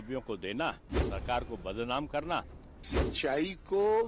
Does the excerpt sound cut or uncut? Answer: cut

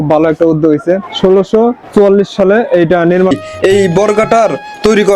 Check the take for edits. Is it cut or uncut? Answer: cut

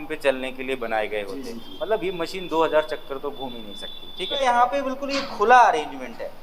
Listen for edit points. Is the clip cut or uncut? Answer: cut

